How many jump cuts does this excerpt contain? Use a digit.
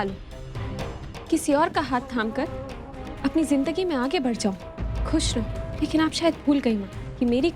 1